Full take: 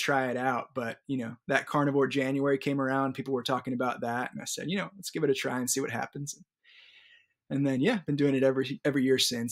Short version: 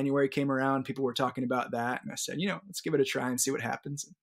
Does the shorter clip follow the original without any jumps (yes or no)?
yes